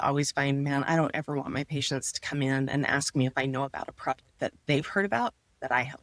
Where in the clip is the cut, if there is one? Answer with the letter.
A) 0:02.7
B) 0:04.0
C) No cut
C